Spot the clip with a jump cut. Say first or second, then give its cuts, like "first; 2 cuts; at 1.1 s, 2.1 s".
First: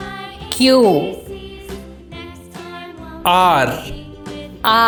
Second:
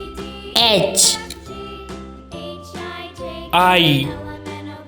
second; 2 cuts; at 1.6 s, 3.5 s